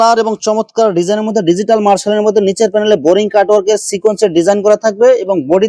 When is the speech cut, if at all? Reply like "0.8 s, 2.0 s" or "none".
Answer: none

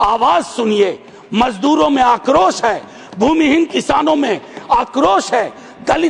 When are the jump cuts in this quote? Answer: none

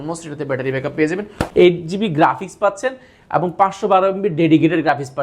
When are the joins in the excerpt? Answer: 1.4 s

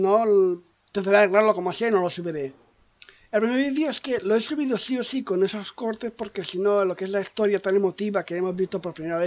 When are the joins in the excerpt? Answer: 4.5 s

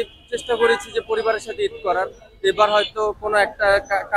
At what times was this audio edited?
none

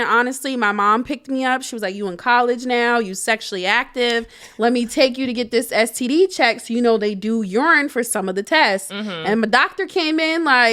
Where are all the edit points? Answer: none

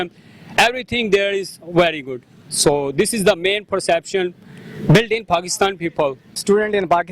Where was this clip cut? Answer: 6.2 s

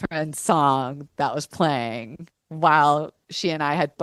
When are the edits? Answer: none

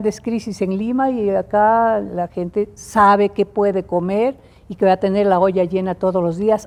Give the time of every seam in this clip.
none

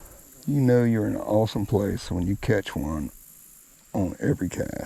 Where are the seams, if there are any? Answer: none

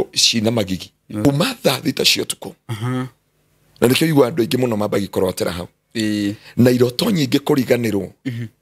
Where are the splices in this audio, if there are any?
1.2 s

